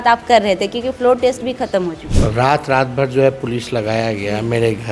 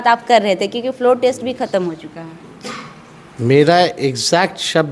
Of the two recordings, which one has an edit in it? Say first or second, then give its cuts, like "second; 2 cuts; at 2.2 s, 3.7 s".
first; 1 cut; at 2.1 s